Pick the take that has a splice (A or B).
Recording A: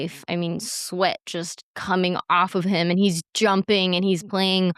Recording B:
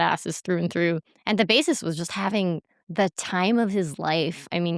B